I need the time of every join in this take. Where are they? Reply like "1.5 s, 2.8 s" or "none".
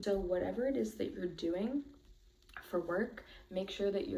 none

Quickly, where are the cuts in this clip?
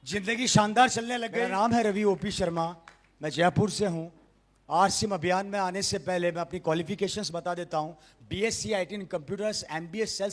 1.3 s

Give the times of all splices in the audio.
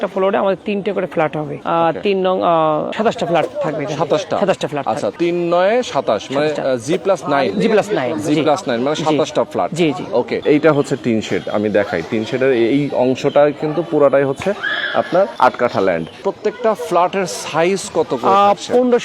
1.6 s, 2.9 s, 5.1 s, 10.4 s, 15.3 s, 16.2 s

